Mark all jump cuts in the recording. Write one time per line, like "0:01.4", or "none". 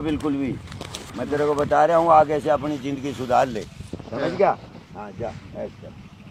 none